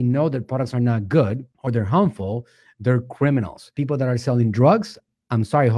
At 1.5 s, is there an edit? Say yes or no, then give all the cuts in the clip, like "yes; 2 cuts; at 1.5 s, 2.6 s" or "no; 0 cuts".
yes; 1 cut; at 1.5 s